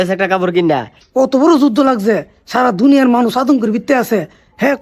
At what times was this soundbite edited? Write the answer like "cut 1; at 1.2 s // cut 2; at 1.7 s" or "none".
cut 1; at 1.0 s